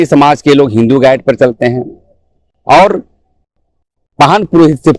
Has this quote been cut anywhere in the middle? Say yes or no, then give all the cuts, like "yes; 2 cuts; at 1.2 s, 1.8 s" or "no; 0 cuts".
no; 0 cuts